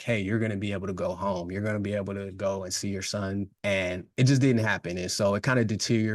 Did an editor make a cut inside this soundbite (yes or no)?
yes